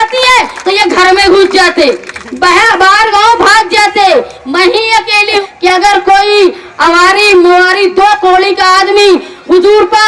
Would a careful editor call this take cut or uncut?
cut